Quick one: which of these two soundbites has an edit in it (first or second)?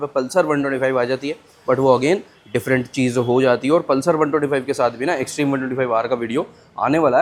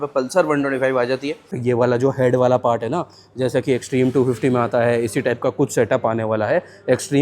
second